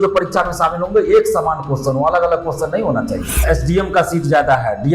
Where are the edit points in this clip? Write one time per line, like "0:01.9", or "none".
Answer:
0:03.4